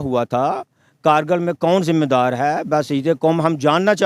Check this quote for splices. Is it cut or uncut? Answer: uncut